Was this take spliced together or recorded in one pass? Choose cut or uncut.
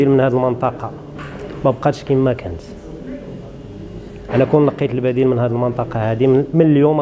uncut